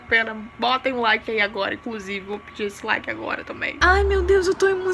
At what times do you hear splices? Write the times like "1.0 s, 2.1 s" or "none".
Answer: 3.8 s